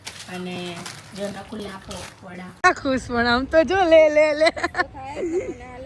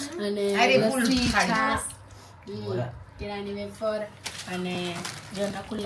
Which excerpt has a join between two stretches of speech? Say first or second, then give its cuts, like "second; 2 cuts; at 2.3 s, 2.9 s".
first; 1 cut; at 2.6 s